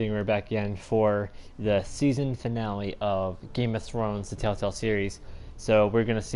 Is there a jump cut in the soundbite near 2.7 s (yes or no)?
no